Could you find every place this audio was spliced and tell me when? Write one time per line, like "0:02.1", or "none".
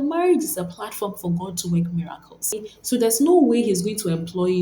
0:02.7